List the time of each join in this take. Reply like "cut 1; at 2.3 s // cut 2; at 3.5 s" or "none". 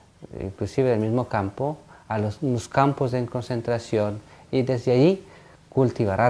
cut 1; at 3.4 s